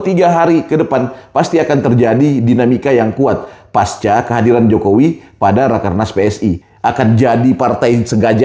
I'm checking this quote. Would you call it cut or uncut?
cut